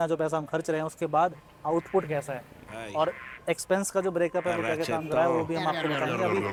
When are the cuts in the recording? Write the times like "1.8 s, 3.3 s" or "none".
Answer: none